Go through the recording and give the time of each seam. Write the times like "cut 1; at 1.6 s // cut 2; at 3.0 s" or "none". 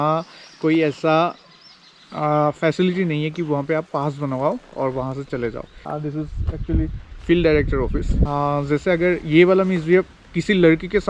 cut 1; at 5.7 s // cut 2; at 8.3 s